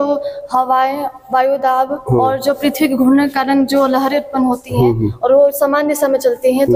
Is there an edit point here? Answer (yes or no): no